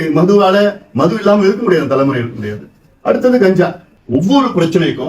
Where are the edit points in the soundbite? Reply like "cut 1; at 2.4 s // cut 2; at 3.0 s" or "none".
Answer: cut 1; at 3.9 s